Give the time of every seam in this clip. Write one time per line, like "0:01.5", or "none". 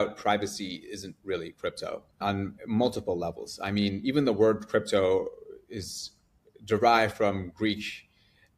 0:02.2